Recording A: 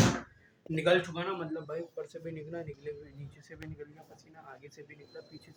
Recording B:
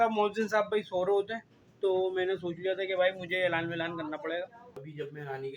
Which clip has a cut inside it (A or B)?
B